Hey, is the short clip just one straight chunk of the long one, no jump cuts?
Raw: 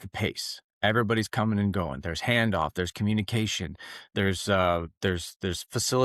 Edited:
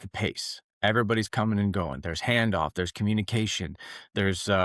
yes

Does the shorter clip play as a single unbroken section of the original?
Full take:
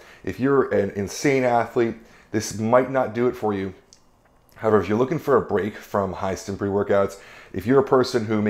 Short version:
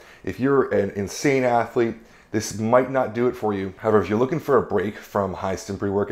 no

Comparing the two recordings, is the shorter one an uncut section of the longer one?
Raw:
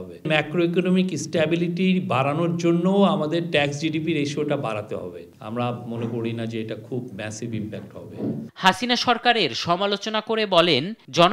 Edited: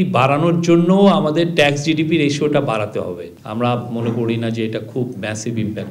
yes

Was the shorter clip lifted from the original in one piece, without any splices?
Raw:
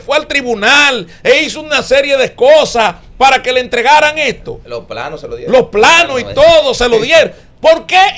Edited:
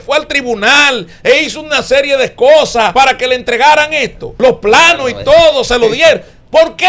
no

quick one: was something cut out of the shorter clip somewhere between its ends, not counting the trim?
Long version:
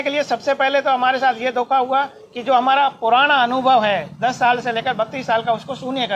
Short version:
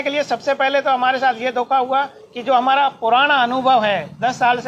no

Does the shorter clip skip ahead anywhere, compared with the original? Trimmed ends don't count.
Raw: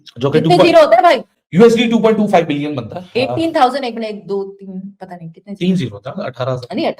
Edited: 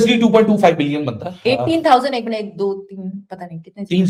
no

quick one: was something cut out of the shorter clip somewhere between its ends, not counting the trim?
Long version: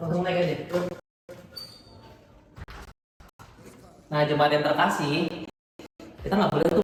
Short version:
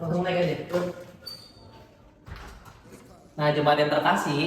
yes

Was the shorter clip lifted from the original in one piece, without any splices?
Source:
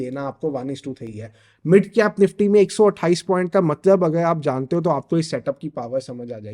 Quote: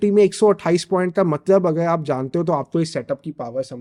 yes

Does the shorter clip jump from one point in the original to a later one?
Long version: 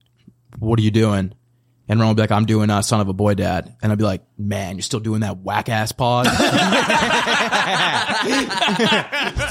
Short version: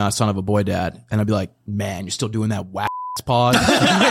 no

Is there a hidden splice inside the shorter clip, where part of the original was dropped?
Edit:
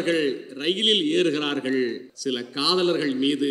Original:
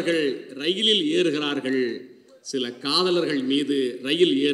yes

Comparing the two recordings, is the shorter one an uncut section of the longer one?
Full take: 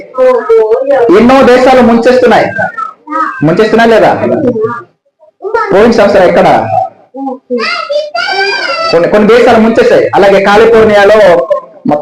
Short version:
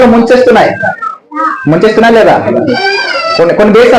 no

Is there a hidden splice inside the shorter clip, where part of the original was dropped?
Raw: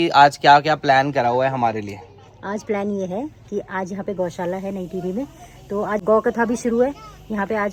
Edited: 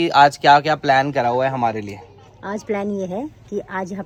no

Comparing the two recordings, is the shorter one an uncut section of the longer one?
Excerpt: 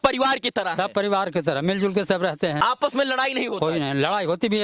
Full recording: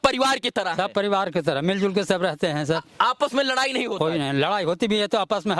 no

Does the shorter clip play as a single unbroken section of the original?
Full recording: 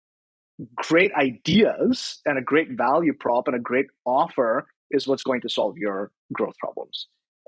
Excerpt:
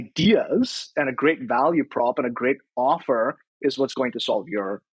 yes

